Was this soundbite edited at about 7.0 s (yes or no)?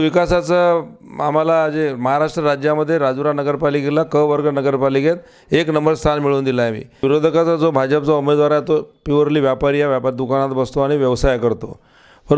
yes